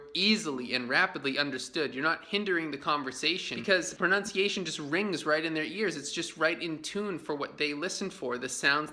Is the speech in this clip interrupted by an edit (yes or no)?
yes